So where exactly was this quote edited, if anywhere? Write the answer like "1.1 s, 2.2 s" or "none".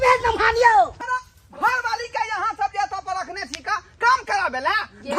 0.9 s